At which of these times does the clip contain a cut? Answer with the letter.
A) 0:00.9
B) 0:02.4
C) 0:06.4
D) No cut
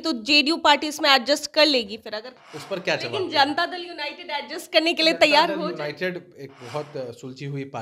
B